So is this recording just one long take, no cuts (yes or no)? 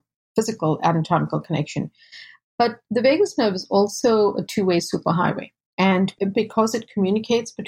no